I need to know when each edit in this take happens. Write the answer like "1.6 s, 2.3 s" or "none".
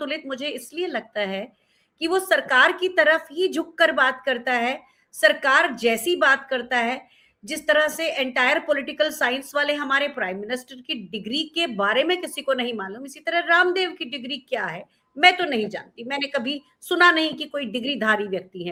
none